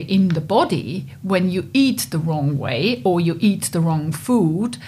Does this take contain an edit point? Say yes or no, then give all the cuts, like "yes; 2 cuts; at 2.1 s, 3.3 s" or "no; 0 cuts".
no; 0 cuts